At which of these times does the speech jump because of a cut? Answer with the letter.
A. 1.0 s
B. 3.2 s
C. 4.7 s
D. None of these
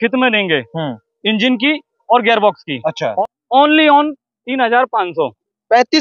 B